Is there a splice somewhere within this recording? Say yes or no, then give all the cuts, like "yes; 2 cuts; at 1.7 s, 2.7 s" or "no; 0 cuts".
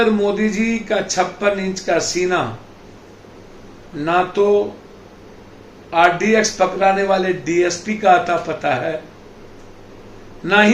no; 0 cuts